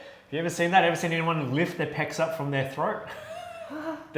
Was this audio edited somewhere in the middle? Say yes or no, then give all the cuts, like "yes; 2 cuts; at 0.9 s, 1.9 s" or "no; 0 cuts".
no; 0 cuts